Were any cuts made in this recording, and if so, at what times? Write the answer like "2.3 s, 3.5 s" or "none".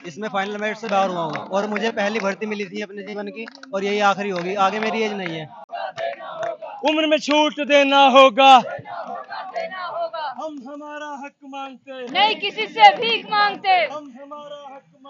5.7 s